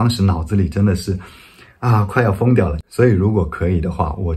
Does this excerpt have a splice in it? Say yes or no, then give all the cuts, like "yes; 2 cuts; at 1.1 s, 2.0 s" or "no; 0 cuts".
yes; 1 cut; at 2.8 s